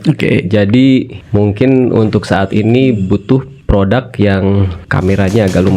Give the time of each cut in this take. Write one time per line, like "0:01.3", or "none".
0:01.2
0:03.5
0:04.8